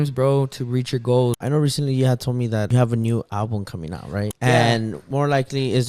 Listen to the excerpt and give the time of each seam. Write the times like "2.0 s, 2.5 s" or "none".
1.4 s, 4.3 s